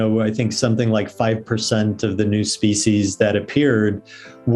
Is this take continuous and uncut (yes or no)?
yes